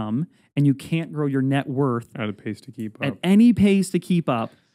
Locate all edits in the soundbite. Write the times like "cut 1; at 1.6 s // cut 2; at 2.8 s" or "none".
none